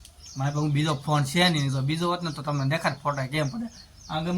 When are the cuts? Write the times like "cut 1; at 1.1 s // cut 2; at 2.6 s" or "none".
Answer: none